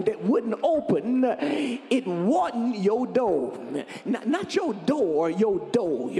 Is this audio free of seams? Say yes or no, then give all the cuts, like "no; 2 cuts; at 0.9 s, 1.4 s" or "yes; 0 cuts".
yes; 0 cuts